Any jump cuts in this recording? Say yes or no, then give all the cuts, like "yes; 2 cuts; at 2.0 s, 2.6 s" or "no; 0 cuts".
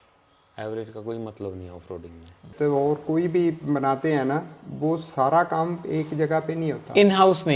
yes; 1 cut; at 2.5 s